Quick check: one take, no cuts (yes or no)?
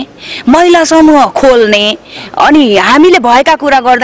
yes